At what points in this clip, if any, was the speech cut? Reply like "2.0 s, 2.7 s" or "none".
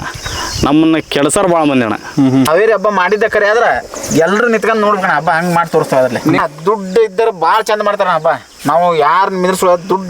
2.5 s, 6.4 s